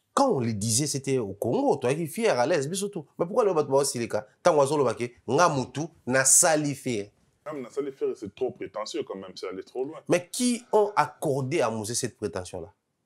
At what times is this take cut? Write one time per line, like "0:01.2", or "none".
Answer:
0:07.6